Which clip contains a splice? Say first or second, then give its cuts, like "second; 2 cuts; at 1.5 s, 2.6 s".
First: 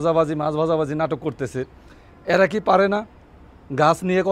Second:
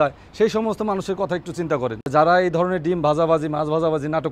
second; 1 cut; at 2.1 s